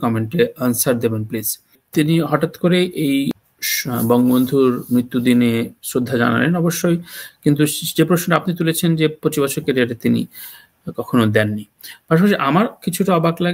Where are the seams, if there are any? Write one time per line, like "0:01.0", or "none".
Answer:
0:01.8
0:03.3